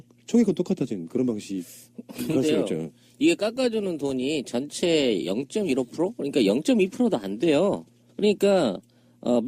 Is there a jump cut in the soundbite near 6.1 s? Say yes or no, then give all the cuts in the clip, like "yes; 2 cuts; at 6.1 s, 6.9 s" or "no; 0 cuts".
no; 0 cuts